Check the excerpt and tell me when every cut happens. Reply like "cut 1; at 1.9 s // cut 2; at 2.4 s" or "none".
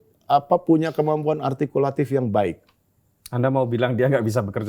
none